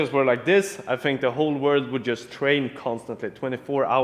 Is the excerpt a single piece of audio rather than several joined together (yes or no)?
yes